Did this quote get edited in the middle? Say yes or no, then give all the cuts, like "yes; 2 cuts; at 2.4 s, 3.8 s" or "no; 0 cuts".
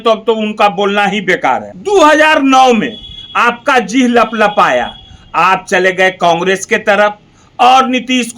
yes; 1 cut; at 1.7 s